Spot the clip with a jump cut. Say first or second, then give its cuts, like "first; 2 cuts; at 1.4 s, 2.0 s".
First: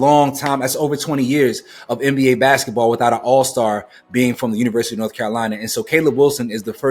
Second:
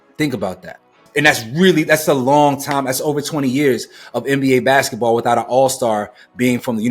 second; 1 cut; at 1.0 s